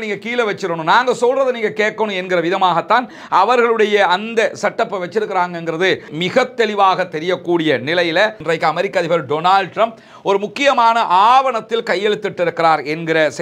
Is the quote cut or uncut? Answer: cut